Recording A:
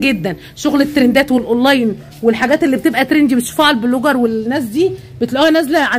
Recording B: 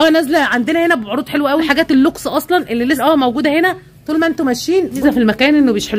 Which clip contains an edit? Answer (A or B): B